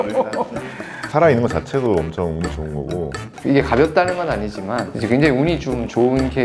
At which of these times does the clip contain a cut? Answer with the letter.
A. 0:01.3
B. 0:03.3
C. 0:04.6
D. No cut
D